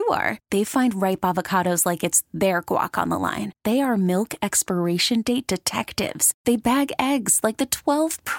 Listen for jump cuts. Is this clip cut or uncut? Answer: uncut